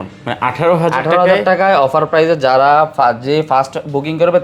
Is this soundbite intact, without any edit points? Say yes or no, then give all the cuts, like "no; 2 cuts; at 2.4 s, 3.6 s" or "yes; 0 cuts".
yes; 0 cuts